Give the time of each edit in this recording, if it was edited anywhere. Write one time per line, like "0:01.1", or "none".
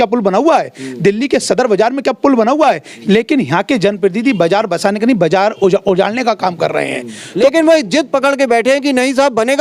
0:02.9
0:07.2